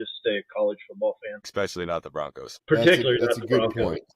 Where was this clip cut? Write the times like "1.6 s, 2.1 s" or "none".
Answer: 2.5 s